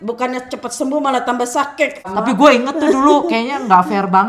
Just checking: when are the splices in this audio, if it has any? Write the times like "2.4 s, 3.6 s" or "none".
2.1 s